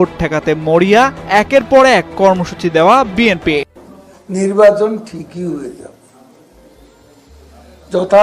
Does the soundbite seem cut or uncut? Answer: cut